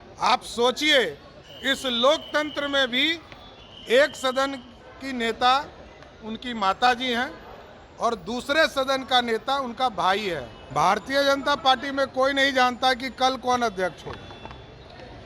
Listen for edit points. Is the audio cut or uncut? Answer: cut